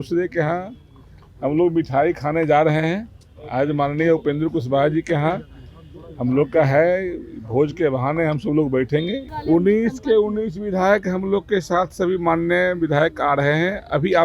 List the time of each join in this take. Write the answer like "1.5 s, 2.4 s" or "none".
9.3 s